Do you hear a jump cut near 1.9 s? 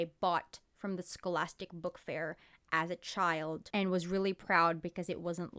no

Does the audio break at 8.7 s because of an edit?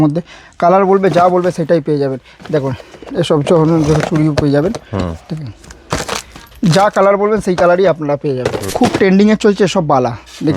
yes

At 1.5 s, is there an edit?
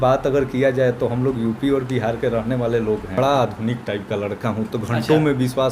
no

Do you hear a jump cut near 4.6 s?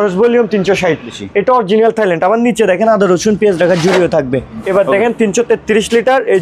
yes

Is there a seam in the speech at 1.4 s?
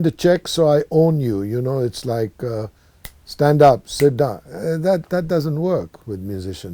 no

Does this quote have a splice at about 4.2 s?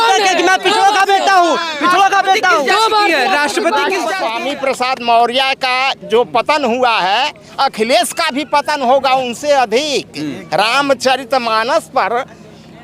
yes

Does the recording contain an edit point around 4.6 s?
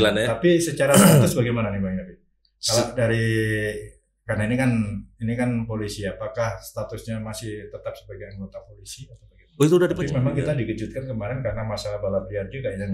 no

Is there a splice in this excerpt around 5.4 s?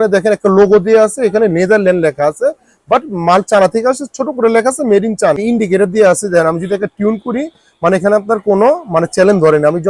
yes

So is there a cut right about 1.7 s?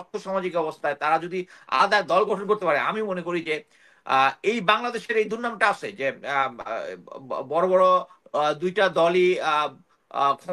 no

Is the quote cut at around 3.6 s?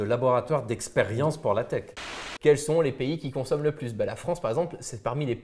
no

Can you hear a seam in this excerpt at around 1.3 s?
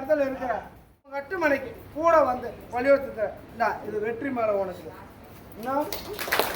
yes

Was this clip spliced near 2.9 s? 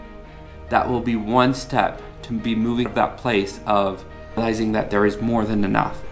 yes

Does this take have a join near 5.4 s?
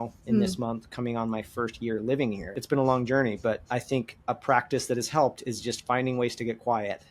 no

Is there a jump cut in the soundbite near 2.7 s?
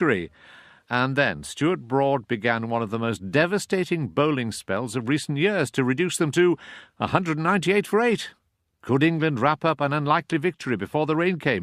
yes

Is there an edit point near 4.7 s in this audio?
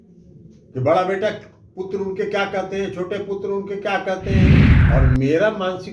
yes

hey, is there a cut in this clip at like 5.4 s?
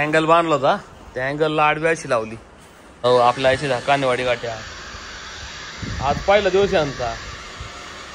no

